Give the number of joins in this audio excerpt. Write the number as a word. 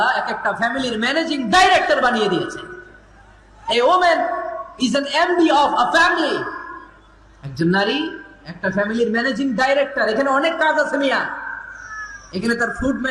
zero